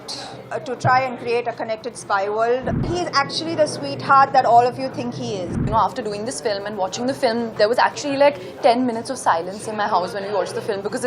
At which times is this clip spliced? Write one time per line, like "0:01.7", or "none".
0:02.8
0:05.6